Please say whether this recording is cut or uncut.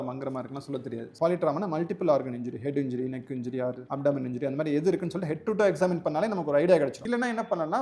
cut